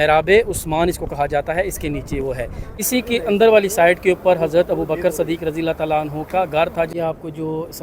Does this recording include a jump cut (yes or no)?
yes